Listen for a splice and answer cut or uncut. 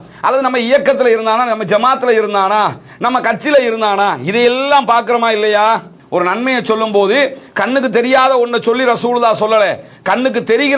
cut